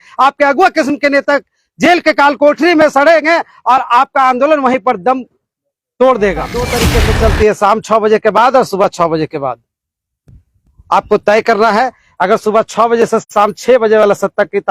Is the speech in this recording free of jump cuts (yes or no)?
no